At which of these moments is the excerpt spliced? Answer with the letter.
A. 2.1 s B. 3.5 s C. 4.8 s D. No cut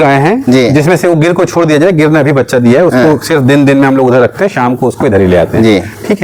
D